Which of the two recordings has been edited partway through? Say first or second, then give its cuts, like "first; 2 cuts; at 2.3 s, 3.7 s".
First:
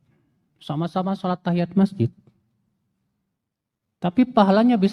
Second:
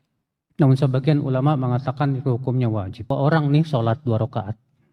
second; 1 cut; at 3.1 s